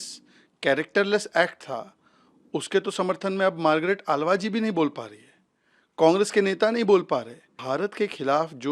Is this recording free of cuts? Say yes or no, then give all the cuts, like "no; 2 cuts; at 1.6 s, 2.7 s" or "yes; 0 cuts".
no; 1 cut; at 7.6 s